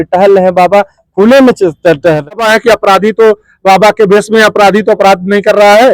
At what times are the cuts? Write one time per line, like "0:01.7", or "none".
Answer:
0:02.4